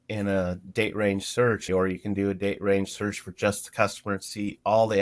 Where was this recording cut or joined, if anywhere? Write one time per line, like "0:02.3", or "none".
0:01.6